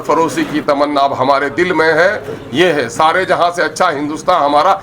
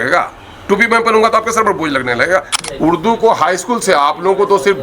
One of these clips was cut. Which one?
second; 1 cut; at 2.5 s

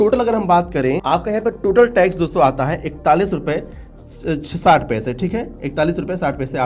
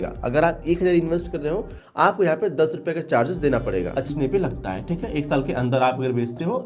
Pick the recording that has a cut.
second; 1 cut; at 4.1 s

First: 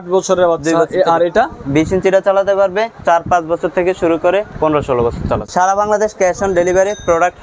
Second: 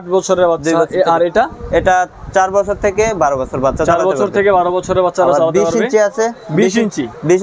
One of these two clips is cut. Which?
first; 4 cuts; at 1.6 s, 3.0 s, 4.5 s, 5.4 s

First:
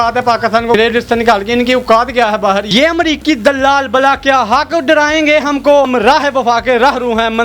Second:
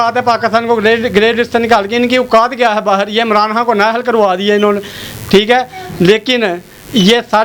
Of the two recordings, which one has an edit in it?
first; 3 cuts; at 0.8 s, 2.7 s, 5.9 s

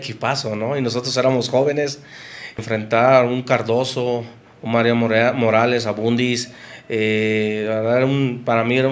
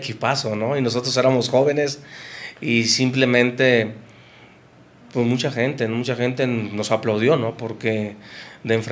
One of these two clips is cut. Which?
first; 1 cut; at 2.6 s

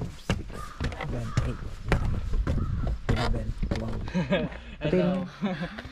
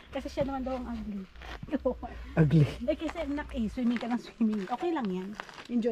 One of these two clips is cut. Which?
first; 1 cut; at 4.0 s

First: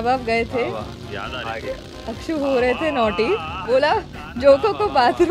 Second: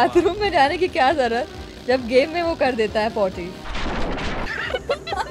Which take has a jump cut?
first; 1 cut; at 3.5 s

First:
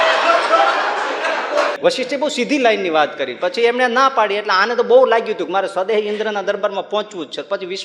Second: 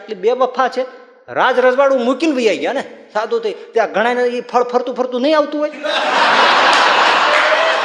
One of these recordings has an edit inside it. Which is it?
first; 1 cut; at 1.8 s

